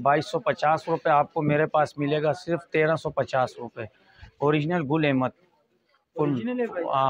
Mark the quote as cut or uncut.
uncut